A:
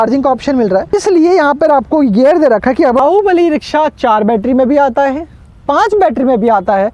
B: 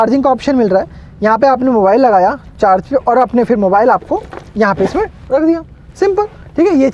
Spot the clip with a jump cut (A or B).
A